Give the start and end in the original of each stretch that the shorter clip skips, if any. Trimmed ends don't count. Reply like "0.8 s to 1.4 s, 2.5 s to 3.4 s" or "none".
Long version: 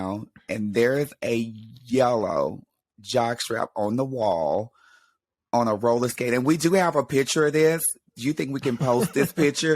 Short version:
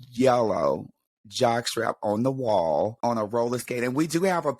4.7 s to 5.5 s

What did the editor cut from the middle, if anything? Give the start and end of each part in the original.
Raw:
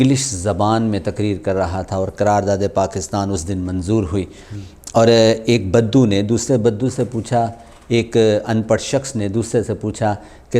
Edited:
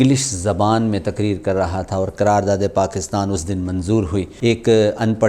4.3 s to 7.8 s

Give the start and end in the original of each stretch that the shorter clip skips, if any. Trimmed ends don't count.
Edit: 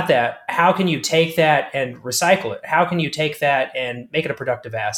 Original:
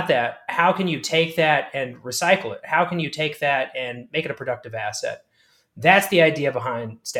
none

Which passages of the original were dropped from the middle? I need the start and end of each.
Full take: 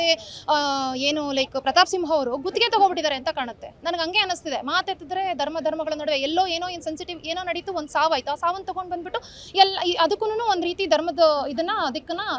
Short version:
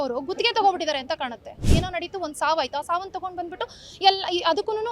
3.7 s to 7.1 s

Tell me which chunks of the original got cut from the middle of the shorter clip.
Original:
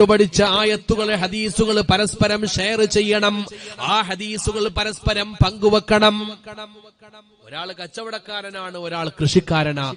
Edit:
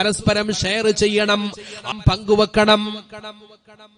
3.8 s to 5.2 s

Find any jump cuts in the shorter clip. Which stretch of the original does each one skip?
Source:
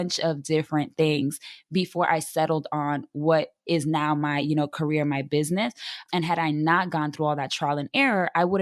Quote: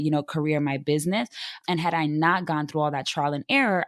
none

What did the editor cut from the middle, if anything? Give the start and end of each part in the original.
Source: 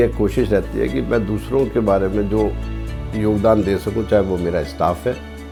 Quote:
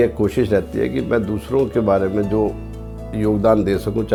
none

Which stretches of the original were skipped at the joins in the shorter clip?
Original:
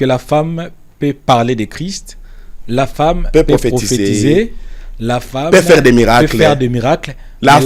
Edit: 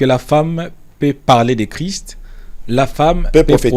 none

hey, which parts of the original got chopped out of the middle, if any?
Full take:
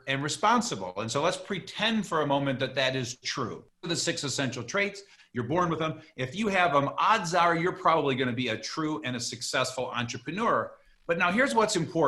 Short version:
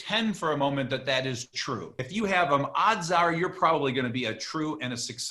3.6 s to 6.2 s

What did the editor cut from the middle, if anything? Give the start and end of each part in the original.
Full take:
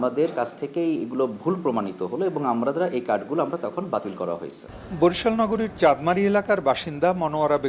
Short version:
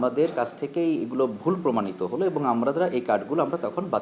none

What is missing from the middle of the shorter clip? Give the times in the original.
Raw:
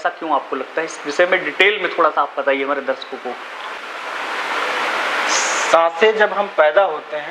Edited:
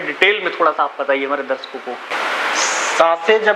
3.5 s to 4.9 s

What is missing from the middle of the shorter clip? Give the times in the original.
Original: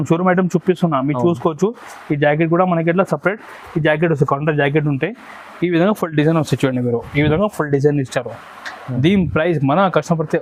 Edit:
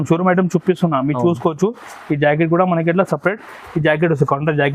none

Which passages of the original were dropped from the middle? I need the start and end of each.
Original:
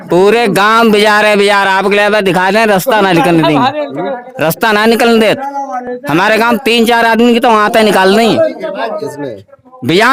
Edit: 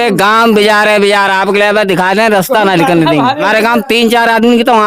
3.8 s to 6.2 s

